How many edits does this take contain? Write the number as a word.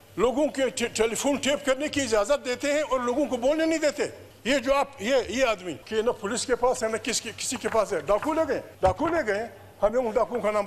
three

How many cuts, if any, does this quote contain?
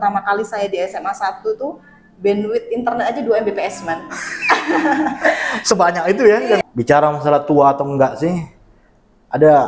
one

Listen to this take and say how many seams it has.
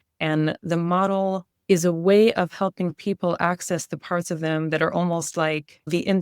one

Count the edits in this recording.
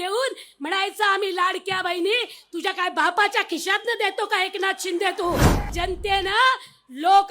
one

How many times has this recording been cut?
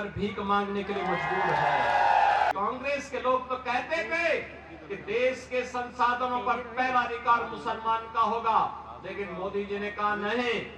one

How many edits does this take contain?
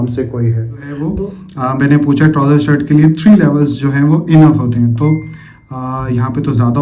one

